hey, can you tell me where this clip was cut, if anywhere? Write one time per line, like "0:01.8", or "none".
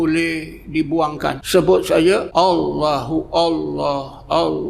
0:01.4
0:02.3